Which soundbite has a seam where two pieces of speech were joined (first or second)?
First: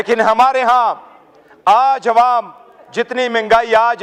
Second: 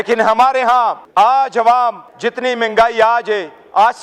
second